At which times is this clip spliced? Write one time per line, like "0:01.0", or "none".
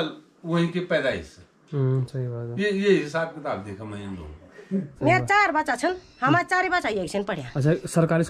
0:04.9